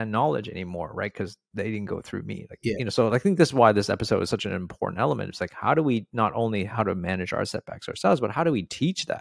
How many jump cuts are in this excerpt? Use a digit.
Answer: 0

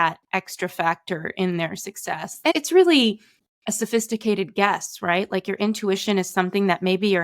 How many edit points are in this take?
1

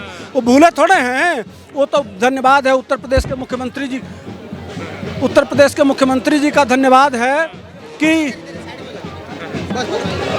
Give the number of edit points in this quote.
0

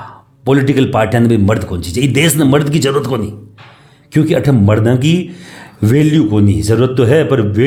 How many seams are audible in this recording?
0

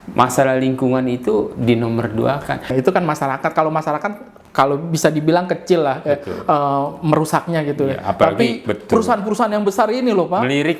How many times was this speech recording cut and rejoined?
1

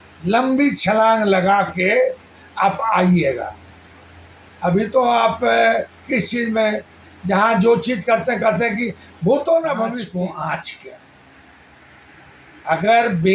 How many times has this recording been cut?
1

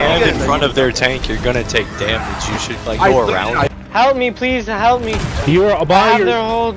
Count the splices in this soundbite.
1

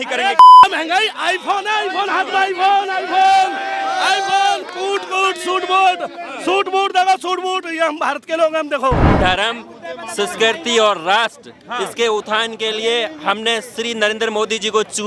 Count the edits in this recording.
1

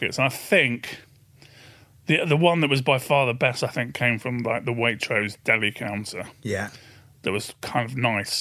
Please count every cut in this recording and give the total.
0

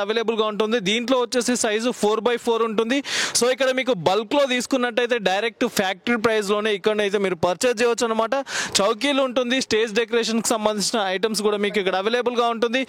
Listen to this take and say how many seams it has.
0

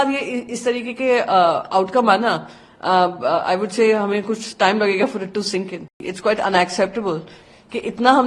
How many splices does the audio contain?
1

